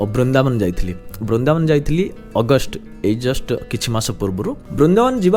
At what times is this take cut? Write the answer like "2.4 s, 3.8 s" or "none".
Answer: none